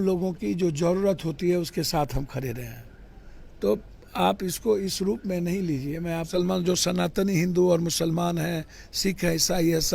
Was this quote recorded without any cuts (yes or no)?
no